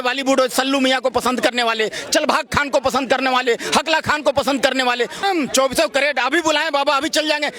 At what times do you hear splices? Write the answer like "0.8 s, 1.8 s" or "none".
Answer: 5.2 s